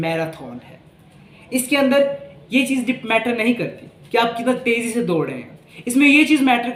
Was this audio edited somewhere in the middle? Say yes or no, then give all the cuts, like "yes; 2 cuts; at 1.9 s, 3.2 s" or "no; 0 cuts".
no; 0 cuts